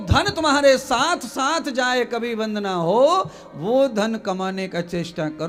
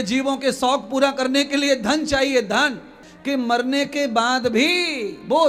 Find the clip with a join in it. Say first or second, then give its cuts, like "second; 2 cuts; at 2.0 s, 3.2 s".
second; 1 cut; at 2.9 s